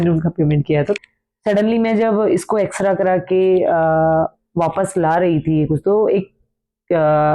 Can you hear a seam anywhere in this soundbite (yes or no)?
yes